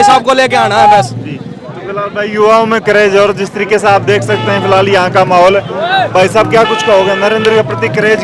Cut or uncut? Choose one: uncut